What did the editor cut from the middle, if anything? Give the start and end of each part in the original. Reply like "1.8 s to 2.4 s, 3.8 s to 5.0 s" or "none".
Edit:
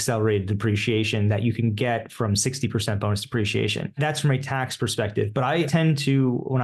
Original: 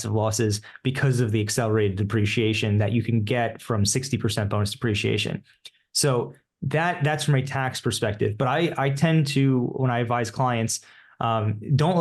5.4 s to 7.0 s, 8.7 s to 9.0 s